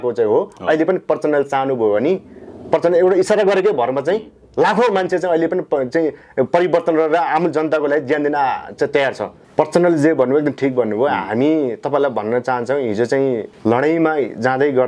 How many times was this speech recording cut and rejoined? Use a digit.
2